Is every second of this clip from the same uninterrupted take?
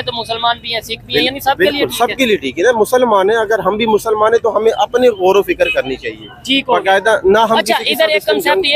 yes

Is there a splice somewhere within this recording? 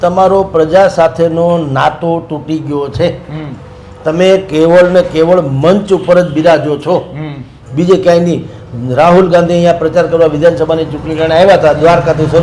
no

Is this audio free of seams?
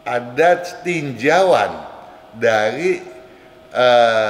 yes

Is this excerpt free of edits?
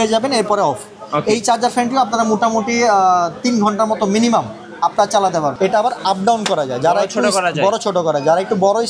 no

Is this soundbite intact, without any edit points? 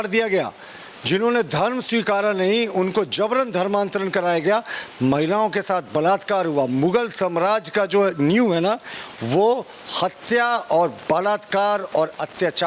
yes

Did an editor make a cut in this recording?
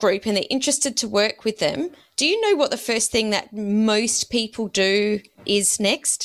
no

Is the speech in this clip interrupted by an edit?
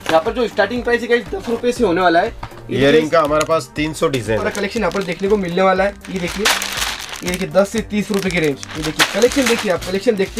yes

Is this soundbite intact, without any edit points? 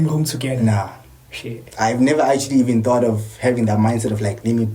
yes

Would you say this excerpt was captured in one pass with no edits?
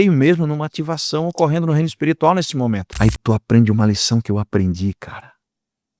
no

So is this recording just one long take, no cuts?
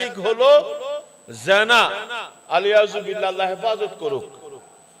yes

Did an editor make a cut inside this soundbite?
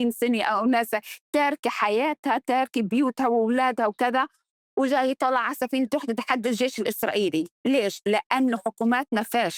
no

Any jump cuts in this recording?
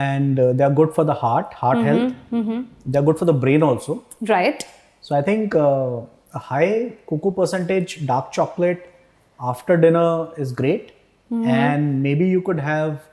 no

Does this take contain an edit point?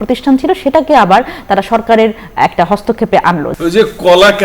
yes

